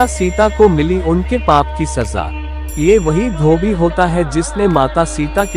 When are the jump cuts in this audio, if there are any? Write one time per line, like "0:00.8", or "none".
0:02.4